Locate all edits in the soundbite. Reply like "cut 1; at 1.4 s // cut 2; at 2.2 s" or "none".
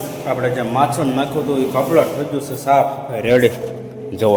none